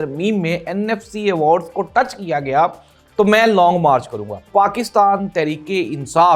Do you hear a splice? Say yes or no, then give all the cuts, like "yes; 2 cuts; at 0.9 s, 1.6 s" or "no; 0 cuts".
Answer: yes; 1 cut; at 4.5 s